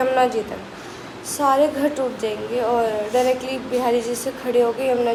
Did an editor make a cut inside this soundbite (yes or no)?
no